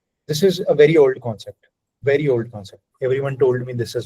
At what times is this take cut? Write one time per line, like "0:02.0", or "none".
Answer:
0:02.8